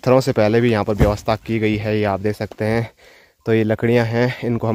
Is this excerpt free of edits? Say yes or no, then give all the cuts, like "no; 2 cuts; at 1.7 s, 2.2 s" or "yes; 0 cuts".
yes; 0 cuts